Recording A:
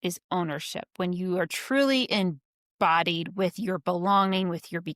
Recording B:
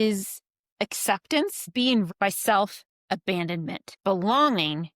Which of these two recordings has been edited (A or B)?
B